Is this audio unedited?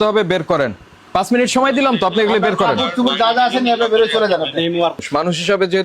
no; 2 cuts; at 1.1 s, 5.0 s

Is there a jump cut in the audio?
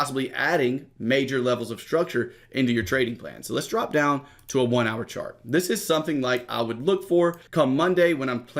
yes; 1 cut; at 7.4 s

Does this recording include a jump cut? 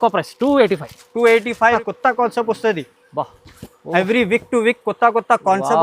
yes; 1 cut; at 1.8 s

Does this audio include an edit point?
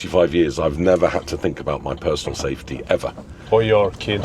no; 0 cuts

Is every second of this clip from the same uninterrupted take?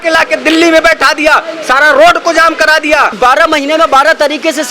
no; 1 cut; at 3.1 s

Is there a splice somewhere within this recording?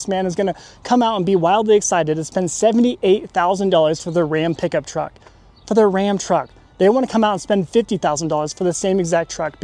no; 0 cuts

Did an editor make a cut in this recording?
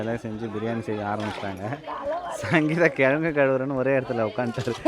no; 0 cuts

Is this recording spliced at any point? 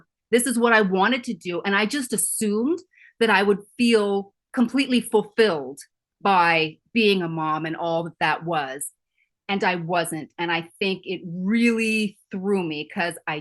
no; 0 cuts

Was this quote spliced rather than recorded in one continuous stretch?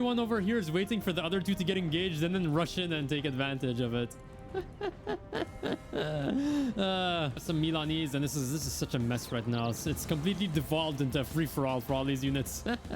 yes; 1 cut; at 7.4 s

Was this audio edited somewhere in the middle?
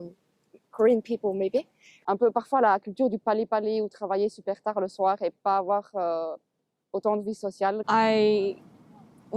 yes; 2 cuts; at 1.9 s, 7.8 s

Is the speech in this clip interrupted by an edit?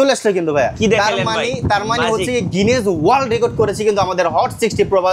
no; 0 cuts

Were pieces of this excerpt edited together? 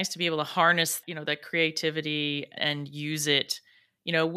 yes; 2 cuts; at 1.0 s, 2.5 s

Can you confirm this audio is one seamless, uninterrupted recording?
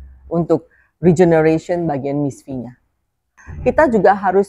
no; 1 cut; at 3.1 s

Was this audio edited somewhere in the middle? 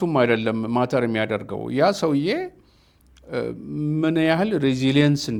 no; 0 cuts

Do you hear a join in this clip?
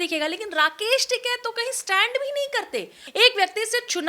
yes; 1 cut; at 3.0 s

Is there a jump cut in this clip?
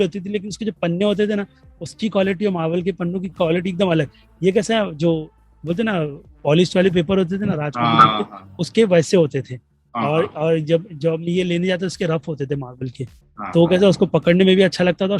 no; 0 cuts

